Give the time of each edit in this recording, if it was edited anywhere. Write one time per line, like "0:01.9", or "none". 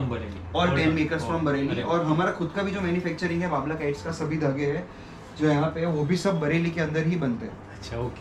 none